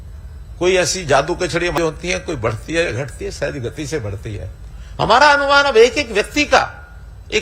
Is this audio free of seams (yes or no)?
no